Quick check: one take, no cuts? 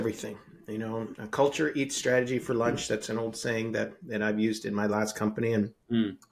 yes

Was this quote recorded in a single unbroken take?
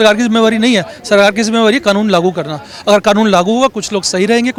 yes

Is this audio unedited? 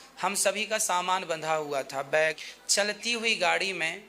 no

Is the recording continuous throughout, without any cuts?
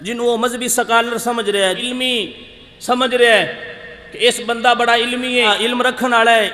no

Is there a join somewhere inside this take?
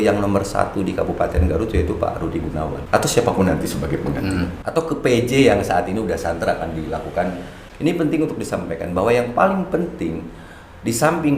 yes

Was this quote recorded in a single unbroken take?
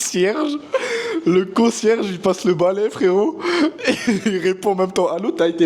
yes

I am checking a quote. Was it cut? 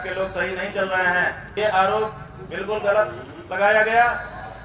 yes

